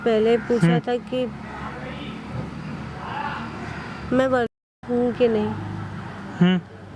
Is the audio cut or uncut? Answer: uncut